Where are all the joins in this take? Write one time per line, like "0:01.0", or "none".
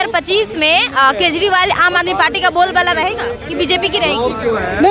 none

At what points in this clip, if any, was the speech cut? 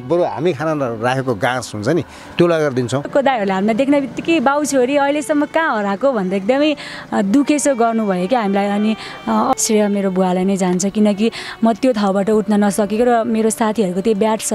0:03.1
0:09.5

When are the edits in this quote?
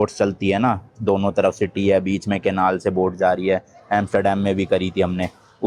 none

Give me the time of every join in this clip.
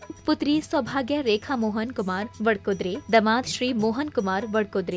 none

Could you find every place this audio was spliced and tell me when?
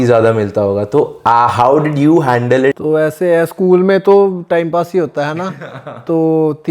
0:01.1
0:02.8

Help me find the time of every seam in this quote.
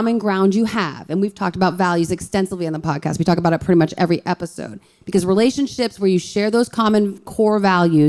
none

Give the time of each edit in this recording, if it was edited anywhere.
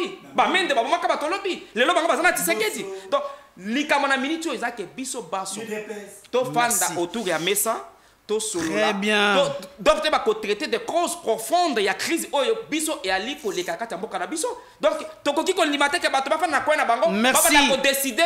none

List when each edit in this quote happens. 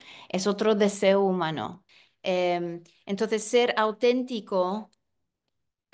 0:01.8

